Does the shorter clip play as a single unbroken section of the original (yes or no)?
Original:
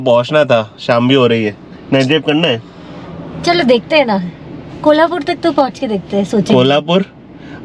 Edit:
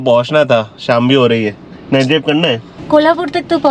no